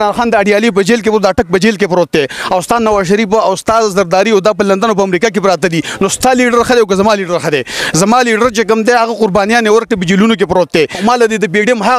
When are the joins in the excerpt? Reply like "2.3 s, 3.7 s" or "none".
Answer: 11.0 s